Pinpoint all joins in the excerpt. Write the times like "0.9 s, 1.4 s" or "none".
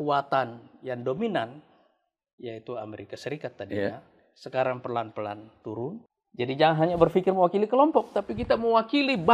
6.0 s